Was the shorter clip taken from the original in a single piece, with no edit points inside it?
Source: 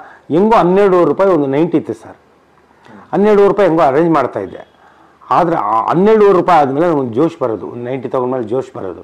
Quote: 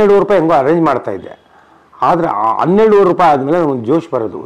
yes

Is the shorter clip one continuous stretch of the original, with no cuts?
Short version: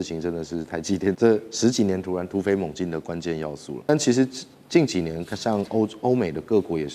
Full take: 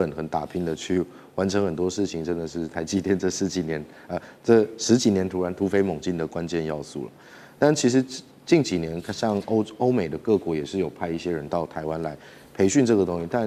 no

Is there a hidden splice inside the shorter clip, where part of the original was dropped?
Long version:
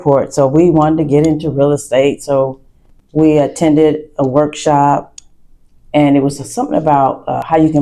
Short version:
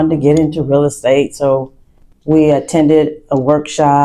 no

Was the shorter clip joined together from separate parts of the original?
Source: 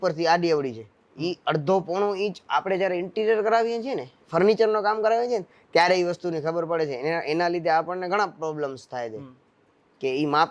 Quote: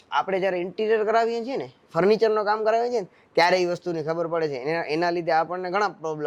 no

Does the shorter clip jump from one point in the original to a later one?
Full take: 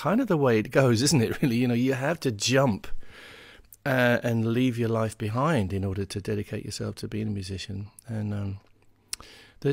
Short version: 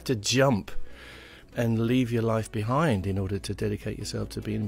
yes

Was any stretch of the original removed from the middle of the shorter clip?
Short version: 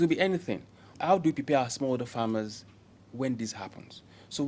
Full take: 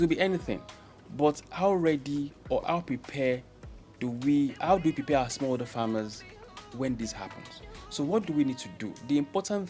yes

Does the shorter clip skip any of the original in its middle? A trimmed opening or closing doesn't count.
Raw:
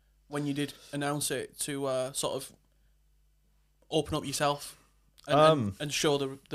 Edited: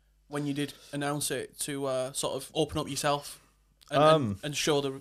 yes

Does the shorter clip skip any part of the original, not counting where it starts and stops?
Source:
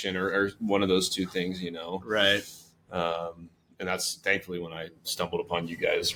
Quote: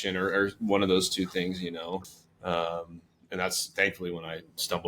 yes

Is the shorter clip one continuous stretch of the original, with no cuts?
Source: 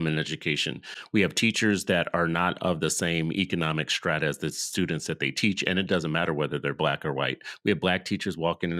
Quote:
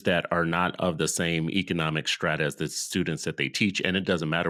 yes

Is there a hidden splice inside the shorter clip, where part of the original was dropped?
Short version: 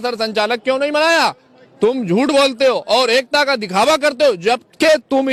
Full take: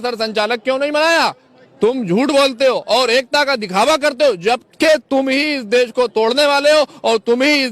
no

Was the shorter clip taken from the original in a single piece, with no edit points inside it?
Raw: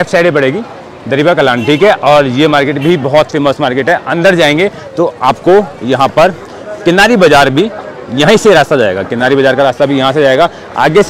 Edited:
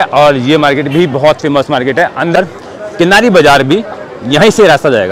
no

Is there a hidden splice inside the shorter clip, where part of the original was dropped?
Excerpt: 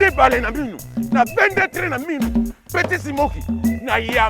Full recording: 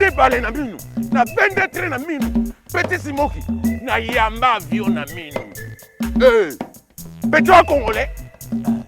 no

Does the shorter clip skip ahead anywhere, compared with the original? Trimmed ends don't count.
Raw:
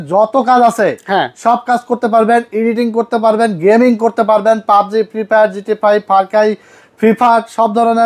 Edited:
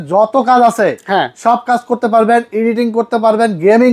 no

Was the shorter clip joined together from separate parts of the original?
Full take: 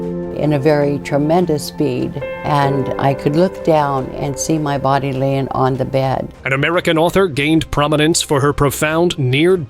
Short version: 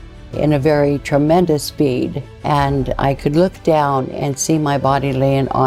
no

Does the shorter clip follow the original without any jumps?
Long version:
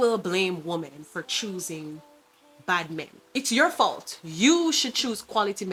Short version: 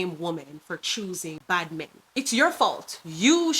no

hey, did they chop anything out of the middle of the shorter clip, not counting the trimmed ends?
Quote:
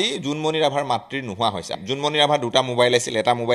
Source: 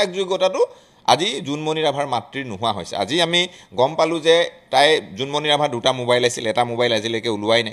yes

